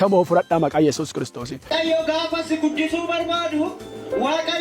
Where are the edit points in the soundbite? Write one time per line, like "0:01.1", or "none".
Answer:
0:01.7